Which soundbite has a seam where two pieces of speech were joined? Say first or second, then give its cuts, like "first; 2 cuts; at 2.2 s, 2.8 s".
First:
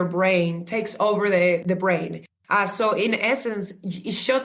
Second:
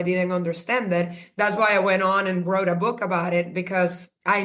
first; 1 cut; at 1.6 s